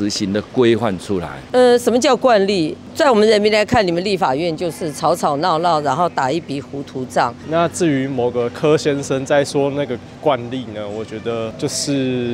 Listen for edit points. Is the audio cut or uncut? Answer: cut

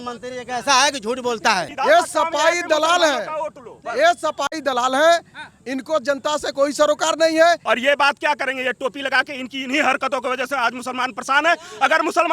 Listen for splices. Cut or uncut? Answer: cut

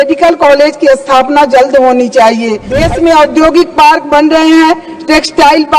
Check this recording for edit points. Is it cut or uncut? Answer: cut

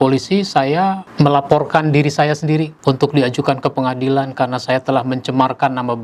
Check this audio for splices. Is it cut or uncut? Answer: uncut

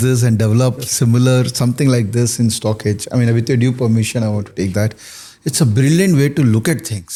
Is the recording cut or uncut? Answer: uncut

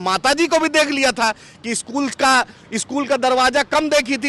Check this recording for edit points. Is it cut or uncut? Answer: uncut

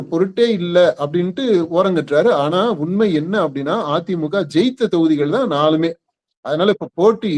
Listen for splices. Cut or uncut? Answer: uncut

